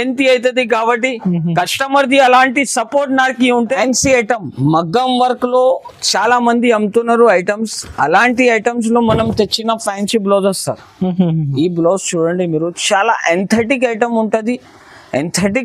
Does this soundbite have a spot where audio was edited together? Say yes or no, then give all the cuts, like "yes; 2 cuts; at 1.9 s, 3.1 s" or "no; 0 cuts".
yes; 1 cut; at 3.8 s